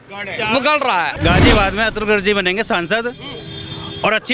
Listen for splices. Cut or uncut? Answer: cut